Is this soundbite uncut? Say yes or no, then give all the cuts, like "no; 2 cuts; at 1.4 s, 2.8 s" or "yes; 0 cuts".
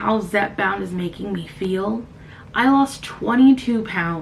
yes; 0 cuts